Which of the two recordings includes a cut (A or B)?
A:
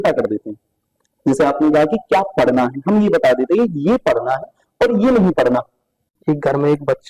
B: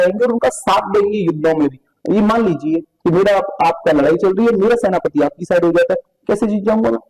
A